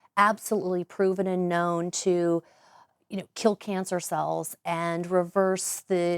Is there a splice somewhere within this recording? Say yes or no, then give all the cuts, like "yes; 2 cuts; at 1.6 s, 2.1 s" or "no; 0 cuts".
no; 0 cuts